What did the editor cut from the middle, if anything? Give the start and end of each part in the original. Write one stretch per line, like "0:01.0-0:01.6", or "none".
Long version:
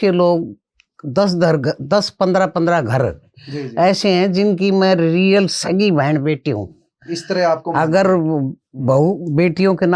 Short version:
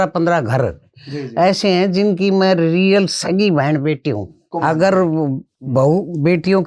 0:06.9-0:07.6